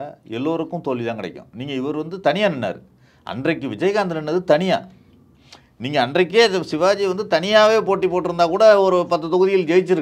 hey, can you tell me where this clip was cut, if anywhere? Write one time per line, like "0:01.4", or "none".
none